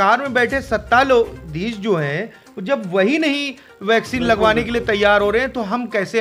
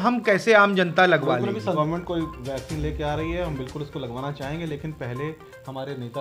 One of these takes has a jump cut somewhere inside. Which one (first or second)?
second